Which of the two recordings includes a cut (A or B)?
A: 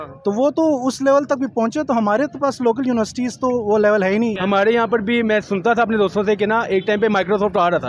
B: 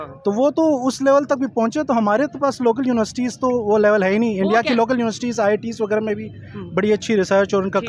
A